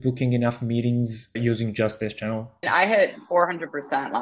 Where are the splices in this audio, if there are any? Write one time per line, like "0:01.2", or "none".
0:01.4
0:02.7